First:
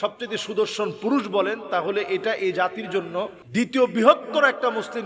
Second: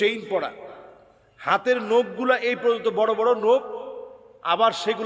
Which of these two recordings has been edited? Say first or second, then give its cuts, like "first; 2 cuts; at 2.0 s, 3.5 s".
first; 1 cut; at 3.4 s